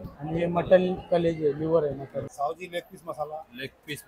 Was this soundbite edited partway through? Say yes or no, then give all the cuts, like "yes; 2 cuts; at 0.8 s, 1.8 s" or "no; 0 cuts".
yes; 1 cut; at 2.3 s